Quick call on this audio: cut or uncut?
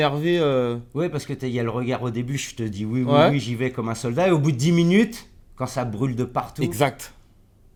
uncut